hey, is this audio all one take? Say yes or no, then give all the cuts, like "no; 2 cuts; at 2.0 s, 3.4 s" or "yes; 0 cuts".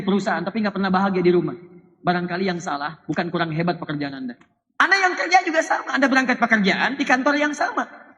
no; 1 cut; at 4.5 s